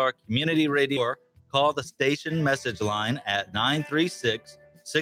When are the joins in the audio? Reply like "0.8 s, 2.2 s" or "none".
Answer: 1.0 s